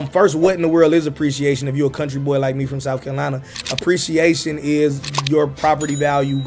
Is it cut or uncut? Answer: uncut